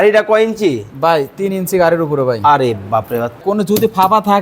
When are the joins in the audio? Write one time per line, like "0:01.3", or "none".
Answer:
0:03.4